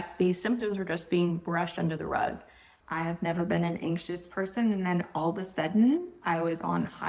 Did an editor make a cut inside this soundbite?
yes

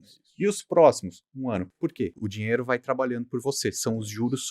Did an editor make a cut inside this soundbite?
yes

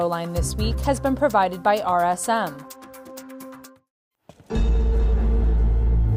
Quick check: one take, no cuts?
no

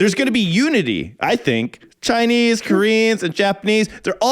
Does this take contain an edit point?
yes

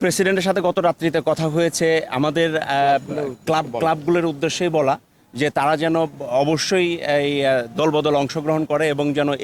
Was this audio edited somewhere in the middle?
no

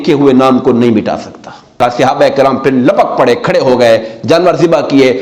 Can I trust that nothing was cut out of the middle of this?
no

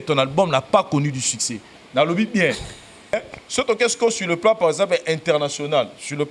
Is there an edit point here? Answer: yes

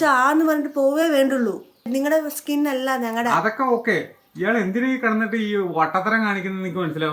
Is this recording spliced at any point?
yes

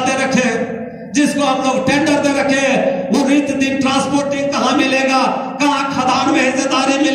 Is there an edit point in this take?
no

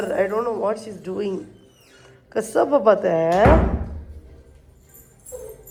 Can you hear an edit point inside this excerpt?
no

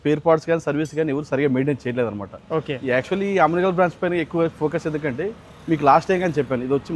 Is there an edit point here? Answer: no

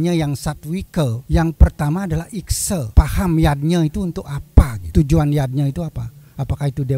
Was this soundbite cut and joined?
yes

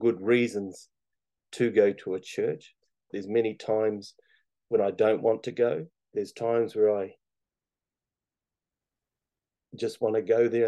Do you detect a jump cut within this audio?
yes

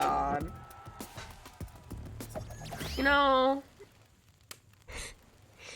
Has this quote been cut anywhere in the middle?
yes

